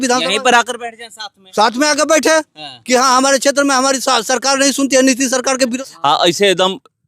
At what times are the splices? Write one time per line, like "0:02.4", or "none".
0:05.7